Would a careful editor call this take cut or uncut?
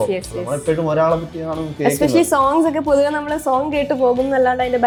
uncut